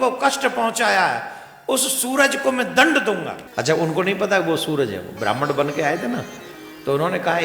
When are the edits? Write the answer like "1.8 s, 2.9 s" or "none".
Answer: 3.4 s